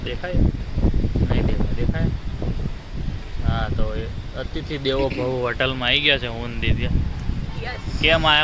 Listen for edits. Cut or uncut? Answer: uncut